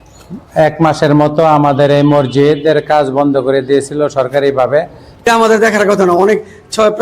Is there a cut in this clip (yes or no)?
yes